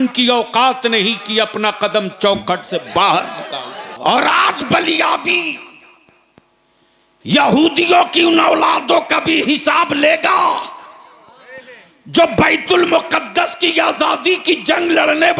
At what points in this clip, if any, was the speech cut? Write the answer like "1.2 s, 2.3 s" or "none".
3.9 s